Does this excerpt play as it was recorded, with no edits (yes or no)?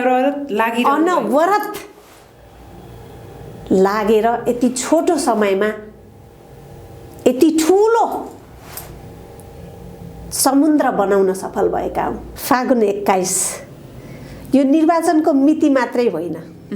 no